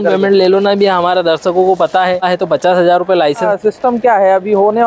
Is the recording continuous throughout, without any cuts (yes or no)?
no